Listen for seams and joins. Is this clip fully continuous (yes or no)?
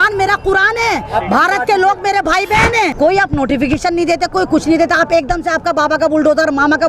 no